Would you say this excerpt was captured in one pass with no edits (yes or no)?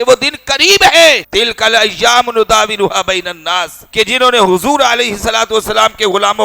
no